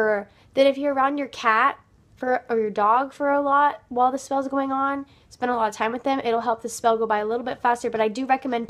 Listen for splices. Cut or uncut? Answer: cut